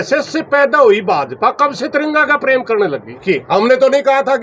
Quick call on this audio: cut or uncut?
cut